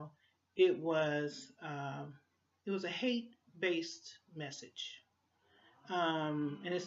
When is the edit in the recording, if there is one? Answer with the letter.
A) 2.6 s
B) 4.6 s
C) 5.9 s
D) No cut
D